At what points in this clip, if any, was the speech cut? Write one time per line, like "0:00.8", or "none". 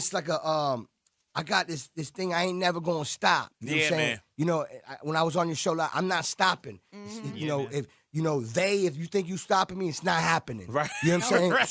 0:05.5